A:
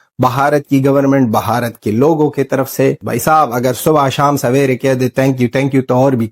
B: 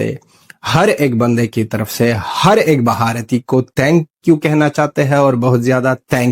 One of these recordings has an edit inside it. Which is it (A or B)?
A